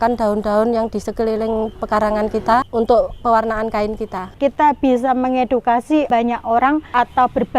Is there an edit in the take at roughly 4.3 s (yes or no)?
yes